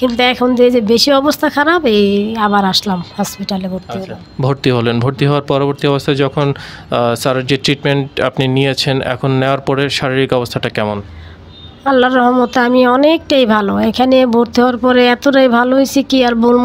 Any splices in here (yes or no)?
no